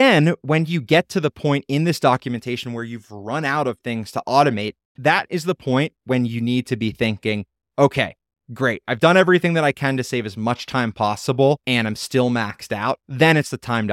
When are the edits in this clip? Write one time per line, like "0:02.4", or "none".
0:04.9
0:11.6
0:13.1